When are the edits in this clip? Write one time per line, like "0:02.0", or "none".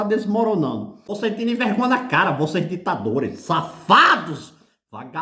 0:01.1